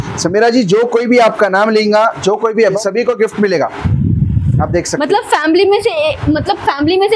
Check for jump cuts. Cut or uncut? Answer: cut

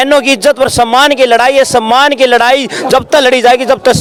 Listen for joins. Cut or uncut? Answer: uncut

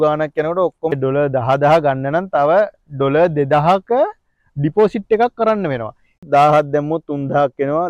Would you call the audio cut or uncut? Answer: cut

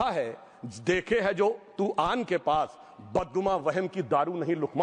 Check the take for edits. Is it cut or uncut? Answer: uncut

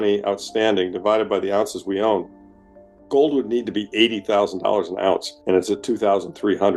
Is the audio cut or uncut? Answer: uncut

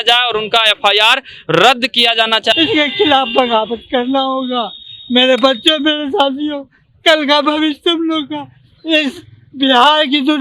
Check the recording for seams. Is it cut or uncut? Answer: cut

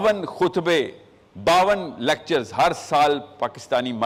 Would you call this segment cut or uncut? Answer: uncut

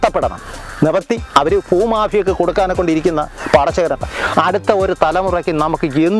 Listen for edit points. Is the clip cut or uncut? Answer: uncut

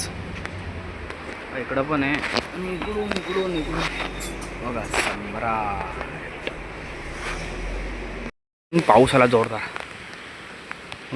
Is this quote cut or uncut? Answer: cut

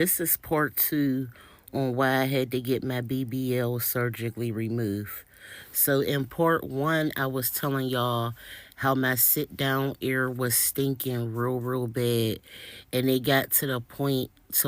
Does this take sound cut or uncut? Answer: uncut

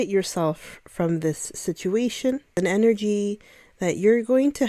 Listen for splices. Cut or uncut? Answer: cut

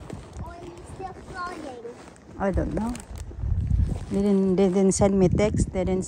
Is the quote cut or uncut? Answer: uncut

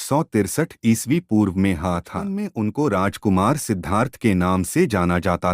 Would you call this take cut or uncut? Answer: cut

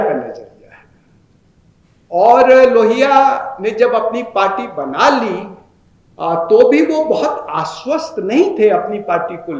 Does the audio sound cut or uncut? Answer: uncut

